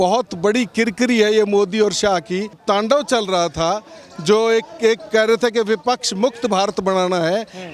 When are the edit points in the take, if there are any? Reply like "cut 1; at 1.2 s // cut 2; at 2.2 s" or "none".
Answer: cut 1; at 2.6 s